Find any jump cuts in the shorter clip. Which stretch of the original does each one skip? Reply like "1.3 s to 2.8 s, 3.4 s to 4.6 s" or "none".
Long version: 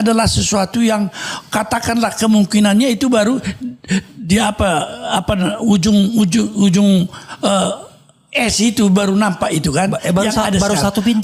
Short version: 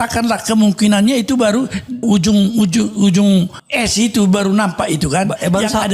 3.7 s to 5.6 s, 7.2 s to 8.2 s